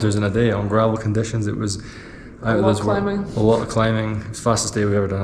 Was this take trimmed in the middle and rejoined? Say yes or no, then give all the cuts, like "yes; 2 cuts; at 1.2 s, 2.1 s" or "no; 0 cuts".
no; 0 cuts